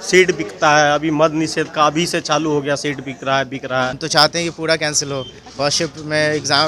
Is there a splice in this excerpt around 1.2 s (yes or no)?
no